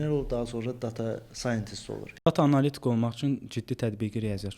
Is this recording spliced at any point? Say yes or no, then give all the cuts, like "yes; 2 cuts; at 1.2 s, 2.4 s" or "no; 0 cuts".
yes; 1 cut; at 2.3 s